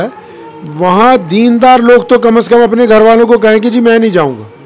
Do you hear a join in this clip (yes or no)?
no